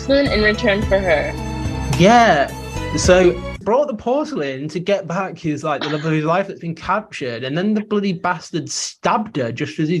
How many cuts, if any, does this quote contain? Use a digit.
1